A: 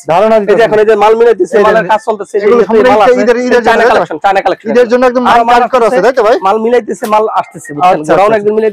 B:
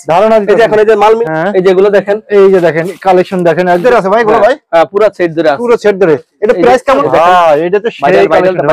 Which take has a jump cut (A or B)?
B